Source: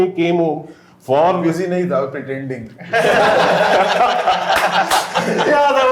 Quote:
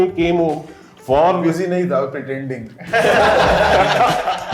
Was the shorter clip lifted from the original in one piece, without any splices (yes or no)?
yes